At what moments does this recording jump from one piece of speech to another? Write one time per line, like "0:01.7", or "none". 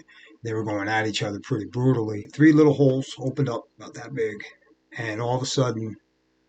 0:02.3